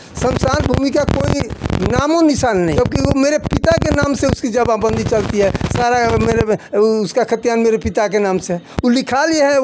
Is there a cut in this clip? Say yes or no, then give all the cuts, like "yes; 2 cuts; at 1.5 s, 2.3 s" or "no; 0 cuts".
yes; 1 cut; at 2.7 s